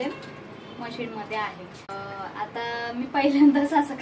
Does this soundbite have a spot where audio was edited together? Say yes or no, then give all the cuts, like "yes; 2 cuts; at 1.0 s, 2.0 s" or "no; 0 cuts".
yes; 1 cut; at 1.9 s